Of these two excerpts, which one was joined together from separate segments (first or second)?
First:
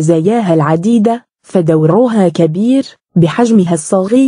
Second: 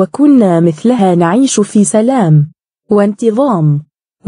first